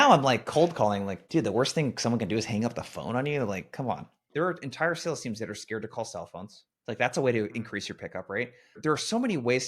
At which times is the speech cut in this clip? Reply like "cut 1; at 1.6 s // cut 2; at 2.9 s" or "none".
cut 1; at 4.2 s // cut 2; at 8.8 s